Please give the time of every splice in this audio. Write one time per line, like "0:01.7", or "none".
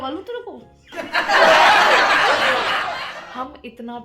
none